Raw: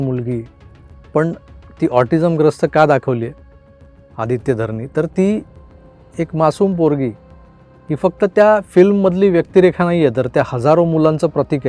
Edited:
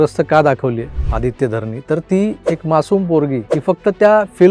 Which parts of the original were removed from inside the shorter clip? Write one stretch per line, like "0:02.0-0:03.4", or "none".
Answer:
0:03.4-0:04.0
0:05.5-0:06.1
0:07.2-0:07.9